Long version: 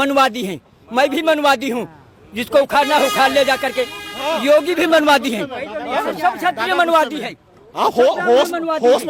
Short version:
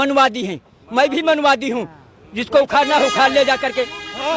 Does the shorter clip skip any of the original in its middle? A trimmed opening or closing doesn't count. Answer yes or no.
no